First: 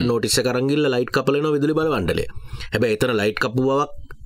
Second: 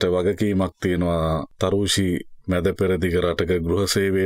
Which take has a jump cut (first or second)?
second